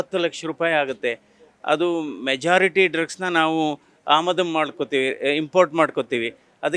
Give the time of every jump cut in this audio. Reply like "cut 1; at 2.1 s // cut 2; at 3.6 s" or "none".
none